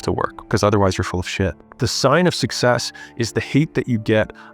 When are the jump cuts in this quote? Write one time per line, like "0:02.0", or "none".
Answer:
0:01.7